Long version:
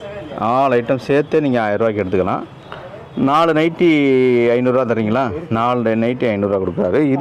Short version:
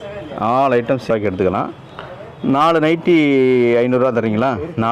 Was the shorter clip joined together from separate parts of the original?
yes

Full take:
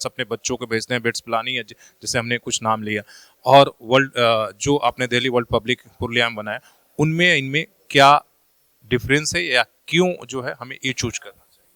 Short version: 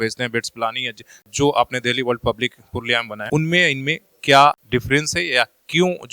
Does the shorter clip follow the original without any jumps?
no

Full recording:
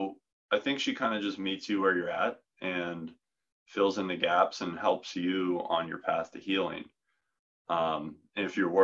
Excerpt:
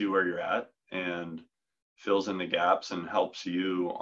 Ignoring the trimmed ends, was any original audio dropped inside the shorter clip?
no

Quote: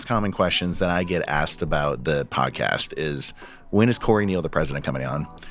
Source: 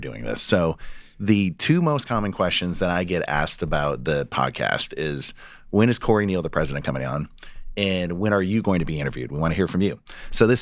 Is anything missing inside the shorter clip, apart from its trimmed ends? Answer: no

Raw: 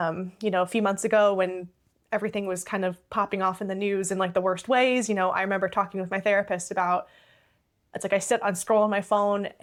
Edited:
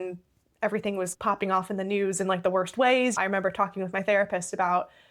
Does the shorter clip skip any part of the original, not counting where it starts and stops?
yes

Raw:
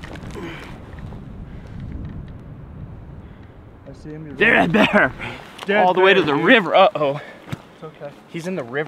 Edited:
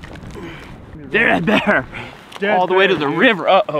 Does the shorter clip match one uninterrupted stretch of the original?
no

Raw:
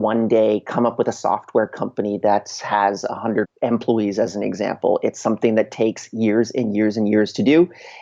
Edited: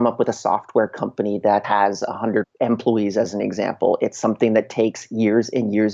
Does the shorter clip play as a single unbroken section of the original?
no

